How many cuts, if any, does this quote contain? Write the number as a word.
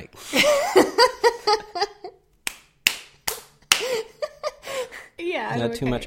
one